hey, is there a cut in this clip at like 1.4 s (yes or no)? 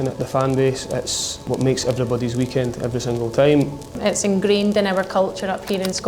yes